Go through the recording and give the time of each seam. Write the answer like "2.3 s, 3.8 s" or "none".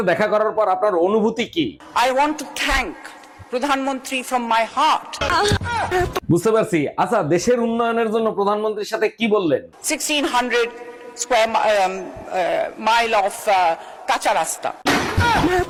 none